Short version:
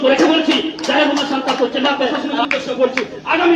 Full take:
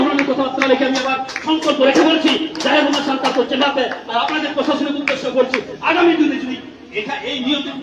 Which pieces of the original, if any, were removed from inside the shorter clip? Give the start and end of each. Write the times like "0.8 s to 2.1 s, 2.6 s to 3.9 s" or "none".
4.0 s to 4.8 s